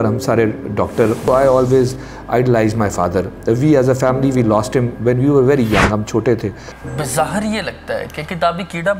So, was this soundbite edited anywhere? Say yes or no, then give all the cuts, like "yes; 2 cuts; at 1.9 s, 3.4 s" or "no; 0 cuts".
yes; 2 cuts; at 1.2 s, 6.7 s